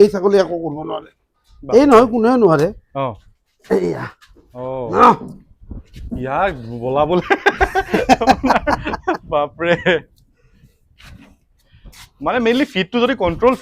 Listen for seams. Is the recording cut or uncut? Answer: uncut